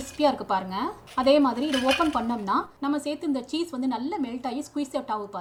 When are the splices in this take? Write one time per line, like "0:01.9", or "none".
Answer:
none